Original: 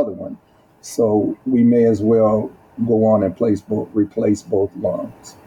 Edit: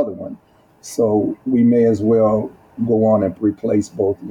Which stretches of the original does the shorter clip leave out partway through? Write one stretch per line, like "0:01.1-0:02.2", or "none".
0:03.3-0:03.9